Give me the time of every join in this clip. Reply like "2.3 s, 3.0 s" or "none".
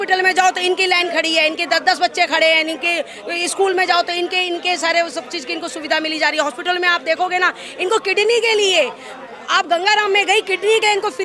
none